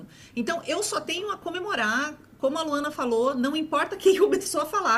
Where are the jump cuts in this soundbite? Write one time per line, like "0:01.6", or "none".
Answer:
none